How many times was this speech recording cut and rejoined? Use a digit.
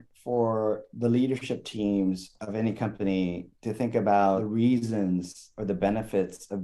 1